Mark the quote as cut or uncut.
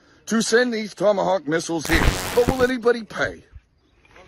cut